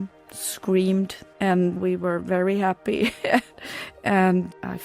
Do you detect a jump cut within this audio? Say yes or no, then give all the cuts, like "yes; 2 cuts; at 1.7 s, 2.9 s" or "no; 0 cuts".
yes; 2 cuts; at 1.6 s, 3.5 s